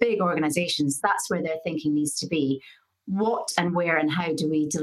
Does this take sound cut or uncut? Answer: cut